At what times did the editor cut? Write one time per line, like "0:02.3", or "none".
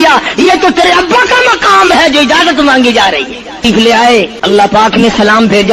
0:04.3